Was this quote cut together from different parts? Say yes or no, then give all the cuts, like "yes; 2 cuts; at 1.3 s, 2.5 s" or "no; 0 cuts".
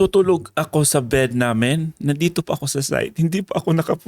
no; 0 cuts